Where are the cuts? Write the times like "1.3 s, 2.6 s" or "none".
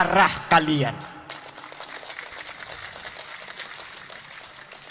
none